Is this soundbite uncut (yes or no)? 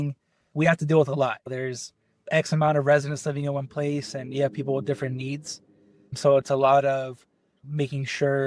yes